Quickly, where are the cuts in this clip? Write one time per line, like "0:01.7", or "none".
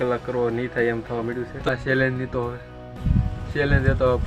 0:01.6

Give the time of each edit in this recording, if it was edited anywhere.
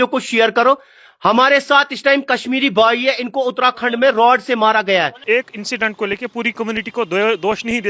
0:05.2

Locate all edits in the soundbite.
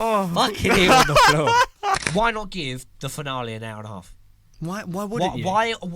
0:02.0

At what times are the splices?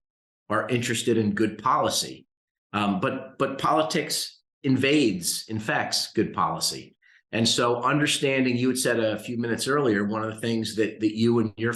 none

